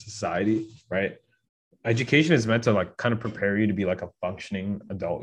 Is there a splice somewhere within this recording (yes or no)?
no